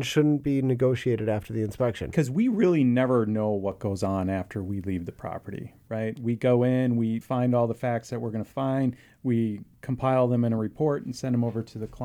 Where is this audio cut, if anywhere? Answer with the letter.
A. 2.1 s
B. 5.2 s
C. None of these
A